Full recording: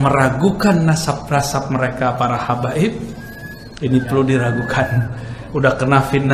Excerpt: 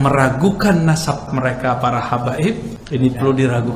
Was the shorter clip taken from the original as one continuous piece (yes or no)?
no